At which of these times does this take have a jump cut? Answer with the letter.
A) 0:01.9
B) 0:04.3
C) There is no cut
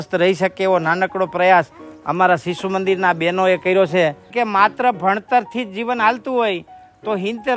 B